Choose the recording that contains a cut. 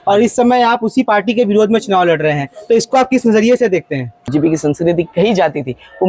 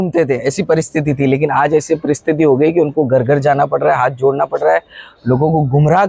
first; 1 cut; at 4.3 s

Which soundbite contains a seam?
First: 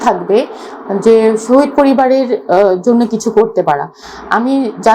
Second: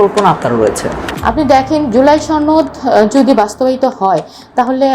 second; 1 cut; at 1.0 s

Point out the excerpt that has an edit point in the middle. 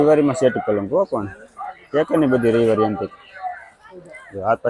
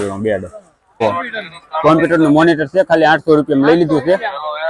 second; 1 cut; at 1.0 s

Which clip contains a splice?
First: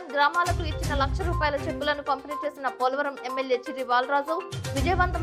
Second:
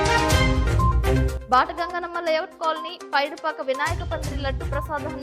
second; 1 cut; at 1.3 s

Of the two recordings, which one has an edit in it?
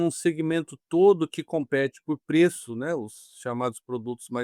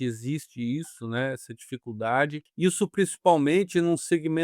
second; 1 cut; at 2.4 s

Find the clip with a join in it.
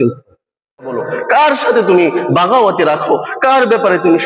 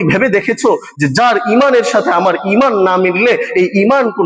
first; 1 cut; at 1.0 s

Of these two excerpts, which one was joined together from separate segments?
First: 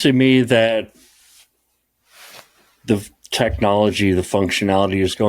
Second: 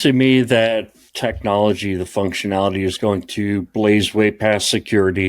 second; 1 cut; at 1.0 s

